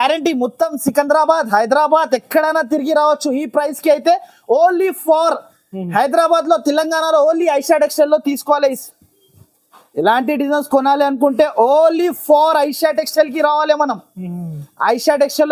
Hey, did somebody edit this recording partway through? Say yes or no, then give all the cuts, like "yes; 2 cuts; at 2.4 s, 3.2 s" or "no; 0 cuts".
yes; 1 cut; at 8.8 s